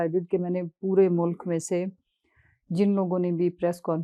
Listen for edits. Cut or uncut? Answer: uncut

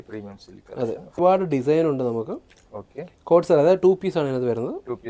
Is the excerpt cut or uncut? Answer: cut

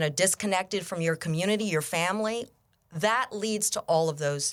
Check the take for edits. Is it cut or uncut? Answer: uncut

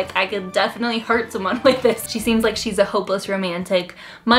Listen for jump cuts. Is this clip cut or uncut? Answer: cut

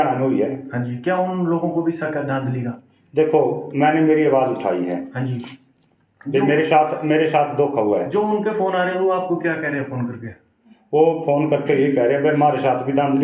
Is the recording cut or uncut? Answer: uncut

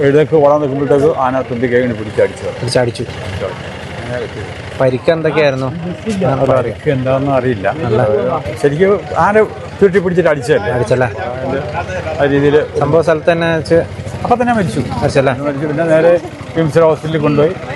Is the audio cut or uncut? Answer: uncut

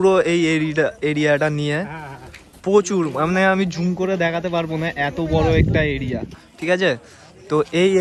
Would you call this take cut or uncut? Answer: uncut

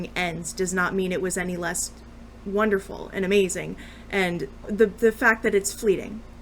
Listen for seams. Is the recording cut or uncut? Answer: cut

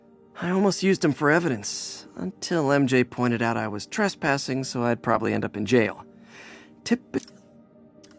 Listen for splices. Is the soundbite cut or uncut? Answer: cut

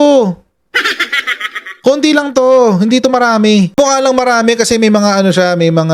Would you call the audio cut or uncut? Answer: cut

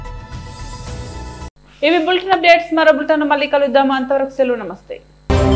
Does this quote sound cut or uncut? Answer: uncut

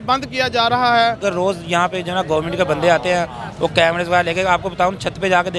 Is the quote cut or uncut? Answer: cut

